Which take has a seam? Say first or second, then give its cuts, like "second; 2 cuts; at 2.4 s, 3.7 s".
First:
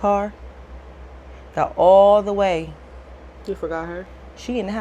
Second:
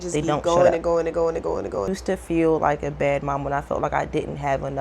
second; 1 cut; at 1.9 s